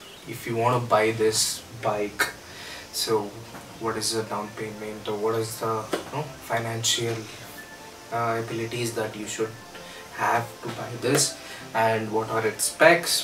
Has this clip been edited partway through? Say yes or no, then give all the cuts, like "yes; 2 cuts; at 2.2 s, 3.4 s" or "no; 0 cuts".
no; 0 cuts